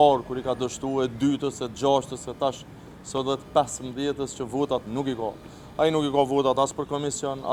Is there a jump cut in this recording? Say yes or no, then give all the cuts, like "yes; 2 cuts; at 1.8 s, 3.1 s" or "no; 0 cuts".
no; 0 cuts